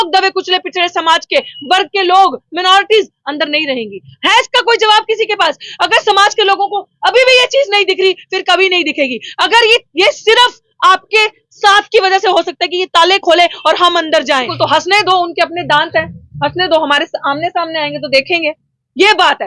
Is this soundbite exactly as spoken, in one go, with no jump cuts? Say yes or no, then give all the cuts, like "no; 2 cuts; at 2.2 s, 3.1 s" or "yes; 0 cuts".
no; 1 cut; at 14.5 s